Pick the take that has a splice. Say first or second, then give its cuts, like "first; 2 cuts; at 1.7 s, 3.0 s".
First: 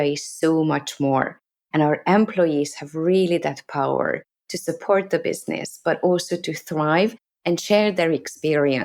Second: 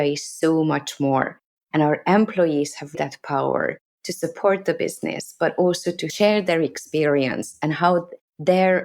second; 2 cuts; at 3.0 s, 6.1 s